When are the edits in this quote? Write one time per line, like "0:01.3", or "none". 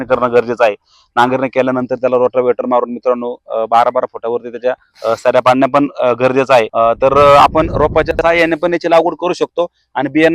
0:06.7